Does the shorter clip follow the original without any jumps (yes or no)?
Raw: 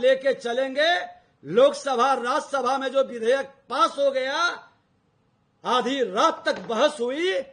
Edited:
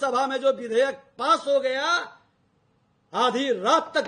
yes